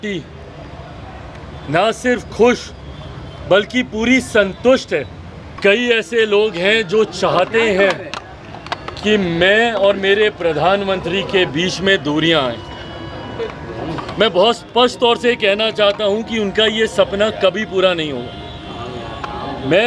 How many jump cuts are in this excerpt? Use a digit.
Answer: 1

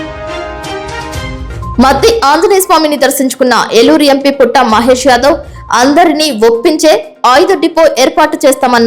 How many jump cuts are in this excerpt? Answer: 1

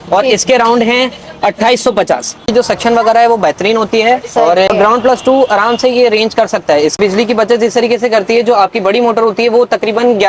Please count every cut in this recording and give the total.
3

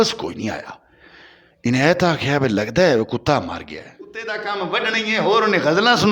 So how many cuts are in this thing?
1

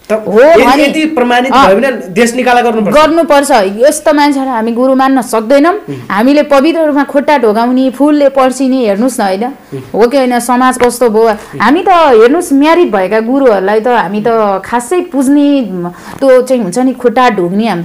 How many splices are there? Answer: 0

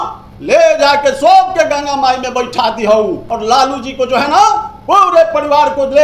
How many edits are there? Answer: 1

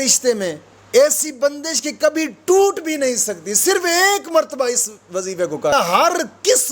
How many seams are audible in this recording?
1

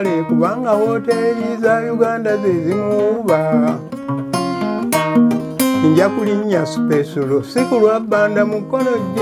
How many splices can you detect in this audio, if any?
0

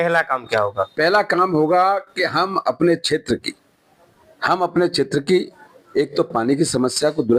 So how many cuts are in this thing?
0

